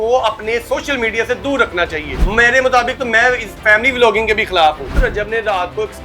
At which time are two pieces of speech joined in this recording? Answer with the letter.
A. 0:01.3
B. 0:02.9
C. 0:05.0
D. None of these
C